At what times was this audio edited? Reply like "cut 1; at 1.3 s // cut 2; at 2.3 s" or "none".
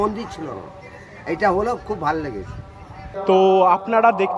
cut 1; at 3.1 s